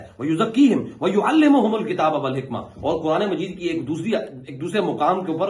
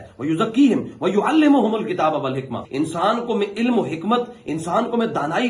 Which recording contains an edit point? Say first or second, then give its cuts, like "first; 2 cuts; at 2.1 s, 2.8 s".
second; 1 cut; at 2.6 s